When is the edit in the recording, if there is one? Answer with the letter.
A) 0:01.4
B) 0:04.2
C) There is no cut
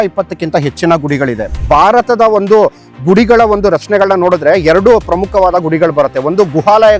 A